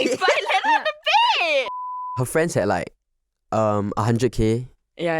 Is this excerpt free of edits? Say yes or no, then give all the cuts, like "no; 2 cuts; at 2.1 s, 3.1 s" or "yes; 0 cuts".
no; 1 cut; at 1.7 s